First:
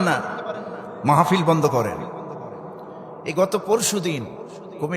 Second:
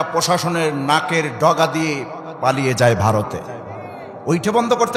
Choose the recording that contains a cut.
first; 1 cut; at 2.9 s

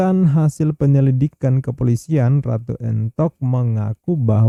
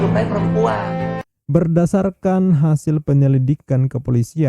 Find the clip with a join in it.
second; 1 cut; at 1.1 s

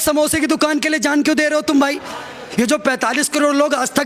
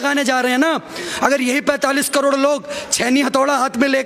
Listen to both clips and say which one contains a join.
first; 1 cut; at 2.4 s

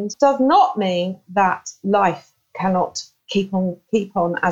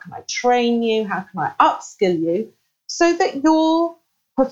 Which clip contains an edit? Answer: first; 1 cut; at 1.8 s

